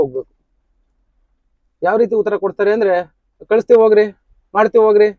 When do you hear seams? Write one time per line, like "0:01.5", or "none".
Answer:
none